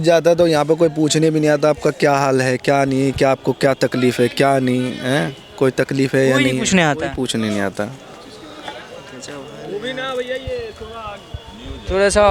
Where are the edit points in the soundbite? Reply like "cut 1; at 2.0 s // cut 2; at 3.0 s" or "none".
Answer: none